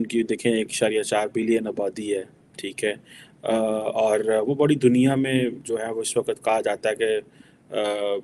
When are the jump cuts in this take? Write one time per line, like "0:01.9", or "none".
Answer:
none